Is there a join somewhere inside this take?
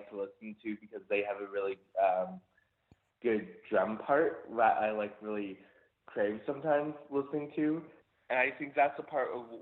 yes; 1 cut; at 7.9 s

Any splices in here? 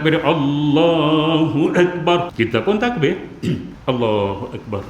yes; 2 cuts; at 2.3 s, 3.7 s

